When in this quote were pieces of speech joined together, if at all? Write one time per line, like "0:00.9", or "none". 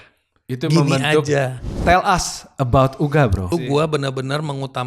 0:01.7
0:03.5